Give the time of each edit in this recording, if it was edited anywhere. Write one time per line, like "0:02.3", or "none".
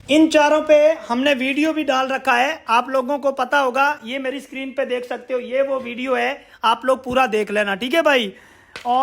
none